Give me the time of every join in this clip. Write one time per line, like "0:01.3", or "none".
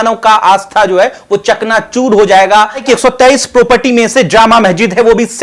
0:02.8